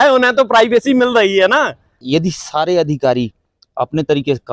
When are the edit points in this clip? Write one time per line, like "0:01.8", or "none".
0:02.0